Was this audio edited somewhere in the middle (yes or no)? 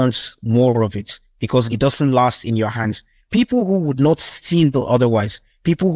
yes